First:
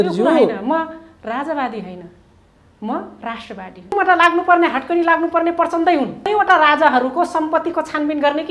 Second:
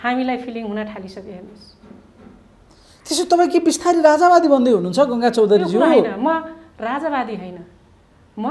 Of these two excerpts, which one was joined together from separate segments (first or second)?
first